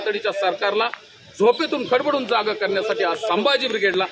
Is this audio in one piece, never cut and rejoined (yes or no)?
yes